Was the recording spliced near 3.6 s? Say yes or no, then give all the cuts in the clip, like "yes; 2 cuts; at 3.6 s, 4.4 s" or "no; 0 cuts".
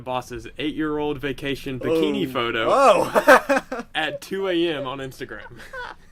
no; 0 cuts